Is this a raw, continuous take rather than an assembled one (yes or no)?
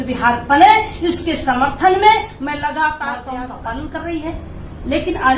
no